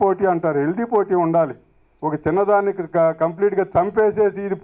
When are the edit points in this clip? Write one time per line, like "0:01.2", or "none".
none

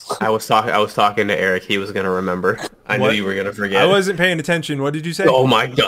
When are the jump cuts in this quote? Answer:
none

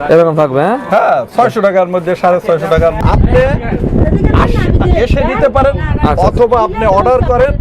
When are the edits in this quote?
0:03.0

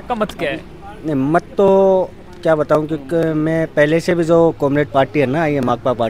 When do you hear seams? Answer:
none

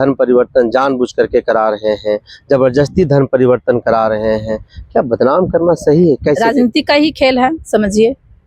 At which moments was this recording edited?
0:06.4

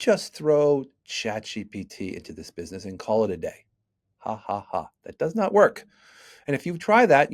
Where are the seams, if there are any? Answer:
none

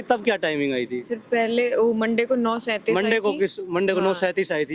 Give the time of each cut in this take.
none

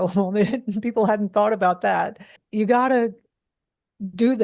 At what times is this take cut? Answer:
0:02.4

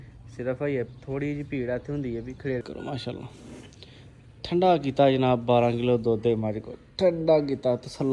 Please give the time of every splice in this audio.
0:02.6

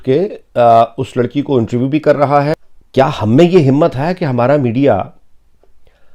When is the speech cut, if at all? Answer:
0:02.5

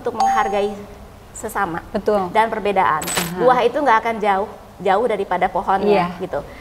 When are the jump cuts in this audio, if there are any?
0:03.2

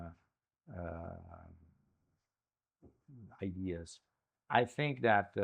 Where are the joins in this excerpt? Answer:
none

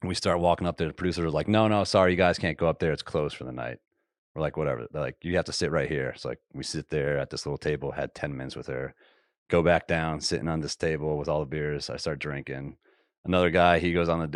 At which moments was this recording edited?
none

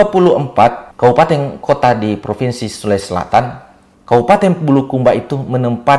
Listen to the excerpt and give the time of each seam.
0:00.9
0:01.5

